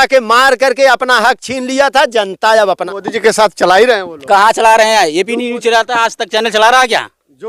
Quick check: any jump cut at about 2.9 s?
yes; 1 cut; at 2.9 s

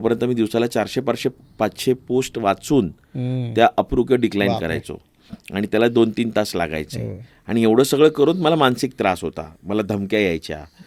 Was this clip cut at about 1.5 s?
no; 0 cuts

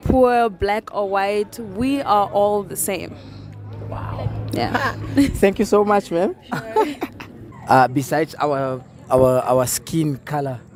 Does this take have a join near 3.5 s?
no; 0 cuts

